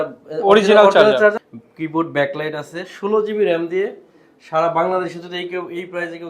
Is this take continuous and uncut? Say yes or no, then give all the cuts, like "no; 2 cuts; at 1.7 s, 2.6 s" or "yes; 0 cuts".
no; 1 cut; at 1.4 s